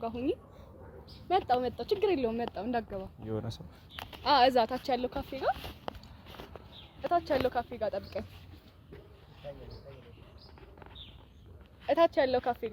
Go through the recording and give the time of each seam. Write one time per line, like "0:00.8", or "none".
none